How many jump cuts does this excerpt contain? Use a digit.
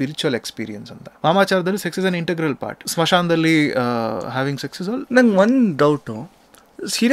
2